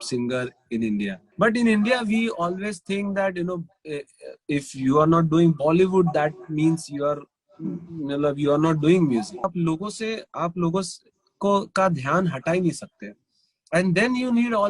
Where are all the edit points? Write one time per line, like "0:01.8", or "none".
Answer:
0:01.2
0:09.5